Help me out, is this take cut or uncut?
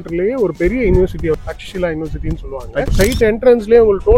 cut